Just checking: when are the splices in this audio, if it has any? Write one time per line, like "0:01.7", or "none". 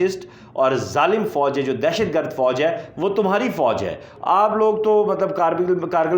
0:04.1